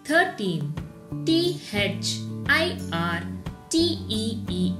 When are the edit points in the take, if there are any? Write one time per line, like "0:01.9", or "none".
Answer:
none